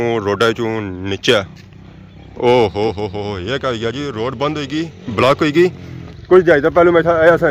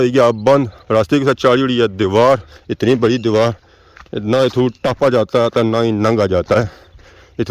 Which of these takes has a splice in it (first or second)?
second